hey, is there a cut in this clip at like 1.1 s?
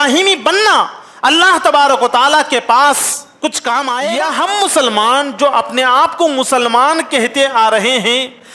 no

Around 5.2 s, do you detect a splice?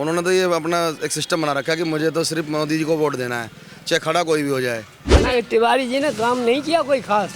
yes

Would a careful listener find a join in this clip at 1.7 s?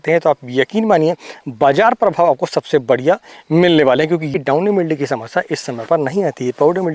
no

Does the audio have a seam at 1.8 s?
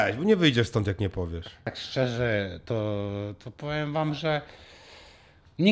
yes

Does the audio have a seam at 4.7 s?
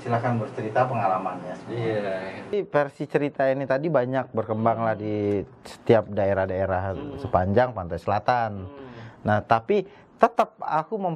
no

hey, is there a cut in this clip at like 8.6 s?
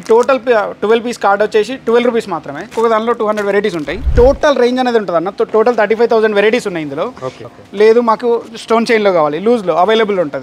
no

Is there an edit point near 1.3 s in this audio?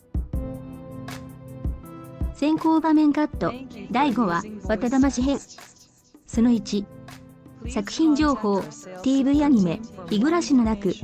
no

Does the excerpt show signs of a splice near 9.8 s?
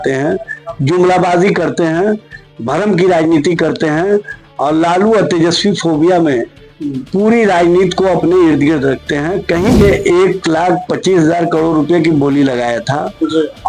yes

